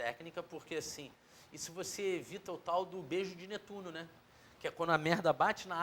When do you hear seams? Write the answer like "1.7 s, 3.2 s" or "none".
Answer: none

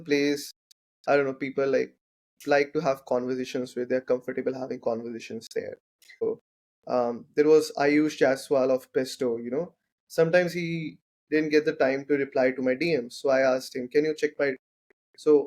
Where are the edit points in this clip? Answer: 6.2 s

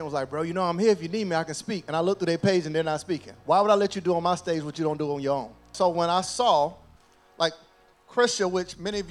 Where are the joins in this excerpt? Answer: 5.7 s

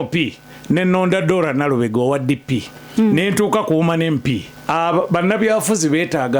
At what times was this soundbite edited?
2.7 s, 4.5 s

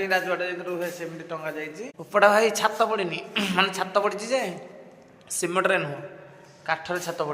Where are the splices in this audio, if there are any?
1.9 s

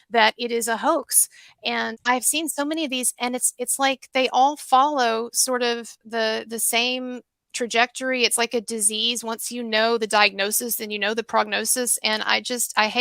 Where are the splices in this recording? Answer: 2.0 s

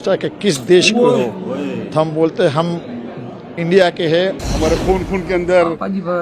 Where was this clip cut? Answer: 4.4 s

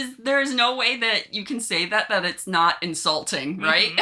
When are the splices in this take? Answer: none

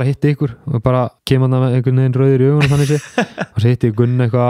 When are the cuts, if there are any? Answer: 1.2 s

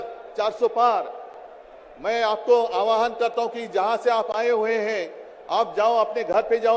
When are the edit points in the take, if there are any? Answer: none

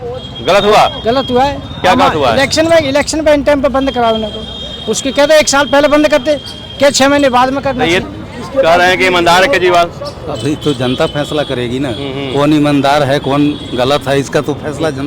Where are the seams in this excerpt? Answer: 8.0 s

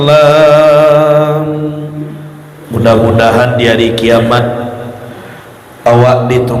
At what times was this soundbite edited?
none

